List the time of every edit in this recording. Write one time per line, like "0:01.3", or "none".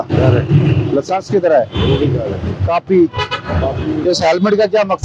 none